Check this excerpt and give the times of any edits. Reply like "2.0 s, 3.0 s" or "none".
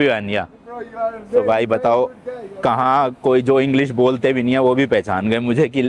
none